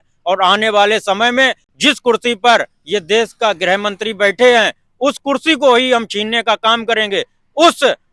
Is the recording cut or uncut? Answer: uncut